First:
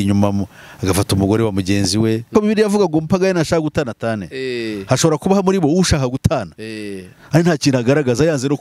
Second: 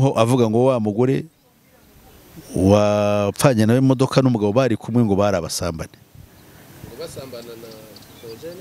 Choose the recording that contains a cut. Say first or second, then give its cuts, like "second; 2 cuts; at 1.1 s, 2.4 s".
first; 1 cut; at 2.3 s